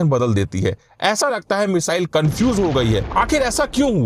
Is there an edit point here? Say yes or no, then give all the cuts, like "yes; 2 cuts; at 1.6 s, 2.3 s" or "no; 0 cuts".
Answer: yes; 1 cut; at 3.1 s